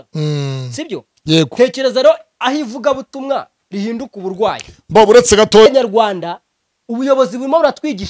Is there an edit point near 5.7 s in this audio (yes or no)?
yes